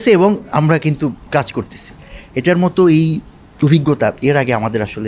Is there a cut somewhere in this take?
yes; 1 cut; at 1.2 s

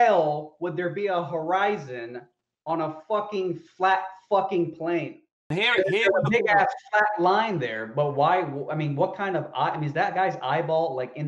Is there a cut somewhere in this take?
yes; 1 cut; at 5.5 s

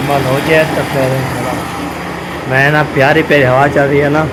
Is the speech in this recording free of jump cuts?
yes; 0 cuts

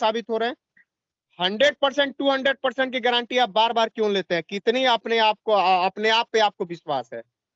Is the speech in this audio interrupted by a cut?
yes; 1 cut; at 1.3 s

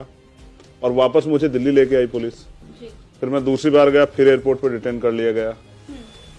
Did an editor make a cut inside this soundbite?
no; 0 cuts

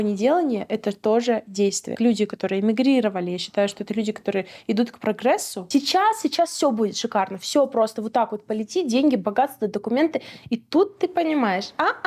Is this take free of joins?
no; 2 cuts; at 1.9 s, 5.5 s

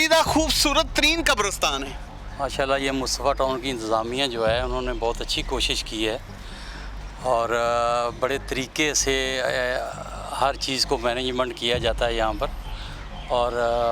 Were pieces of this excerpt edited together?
no; 0 cuts

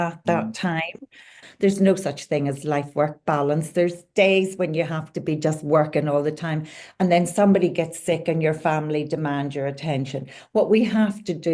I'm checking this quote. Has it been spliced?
yes; 1 cut; at 1.4 s

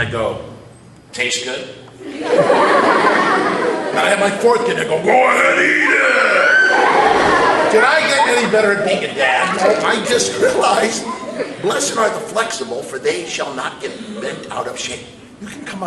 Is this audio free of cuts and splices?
no; 1 cut; at 6.3 s

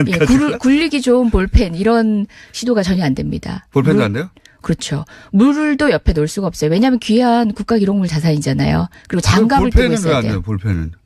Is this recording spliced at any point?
yes; 1 cut; at 2.6 s

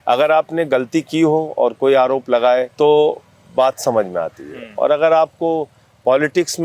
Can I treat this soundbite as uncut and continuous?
no; 1 cut; at 2.7 s

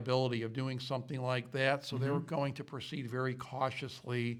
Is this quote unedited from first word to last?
yes; 0 cuts

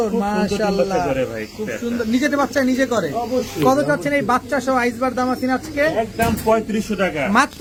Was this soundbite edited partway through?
no; 0 cuts

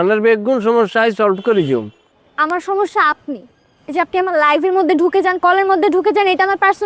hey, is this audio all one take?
yes; 0 cuts

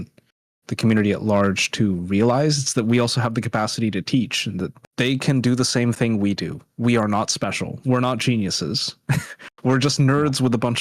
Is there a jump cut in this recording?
no; 0 cuts

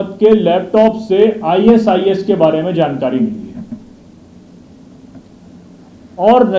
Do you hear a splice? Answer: no; 0 cuts

